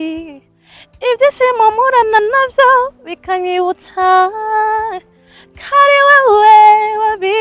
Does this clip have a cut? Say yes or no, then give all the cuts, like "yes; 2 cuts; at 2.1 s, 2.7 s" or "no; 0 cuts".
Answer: no; 0 cuts